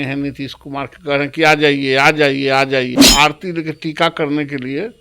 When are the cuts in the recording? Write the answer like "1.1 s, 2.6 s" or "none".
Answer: 2.9 s